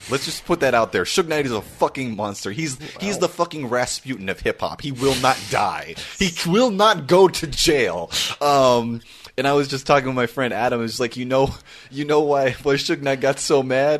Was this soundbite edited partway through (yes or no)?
no